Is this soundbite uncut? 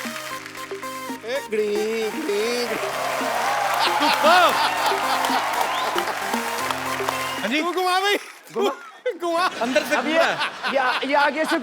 no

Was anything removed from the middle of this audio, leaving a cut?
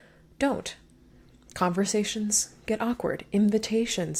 no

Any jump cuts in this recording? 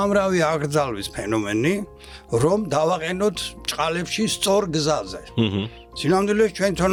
no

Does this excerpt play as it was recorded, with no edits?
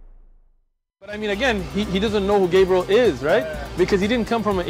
yes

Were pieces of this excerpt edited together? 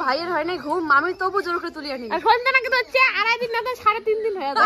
no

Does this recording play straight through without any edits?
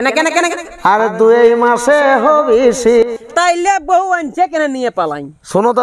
no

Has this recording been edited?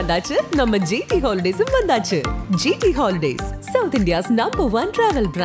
no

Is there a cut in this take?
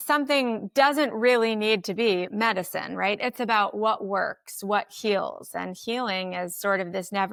no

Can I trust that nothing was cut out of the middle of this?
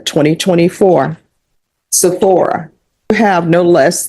no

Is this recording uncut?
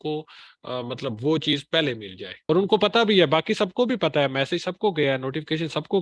no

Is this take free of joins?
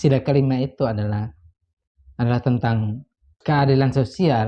yes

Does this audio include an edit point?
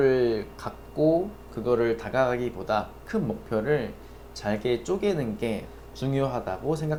no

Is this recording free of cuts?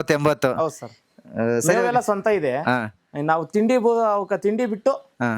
yes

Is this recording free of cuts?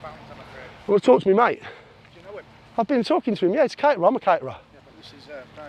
yes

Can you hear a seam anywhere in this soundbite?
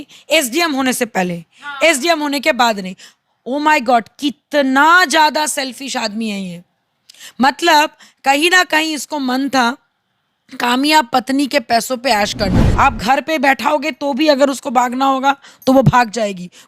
yes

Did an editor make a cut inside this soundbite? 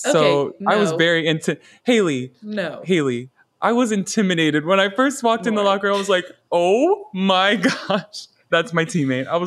yes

